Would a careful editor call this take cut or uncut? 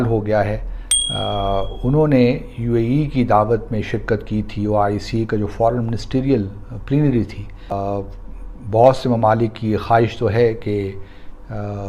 cut